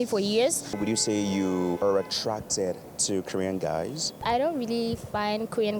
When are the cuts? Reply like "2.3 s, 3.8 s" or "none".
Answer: 0.8 s, 1.8 s, 4.2 s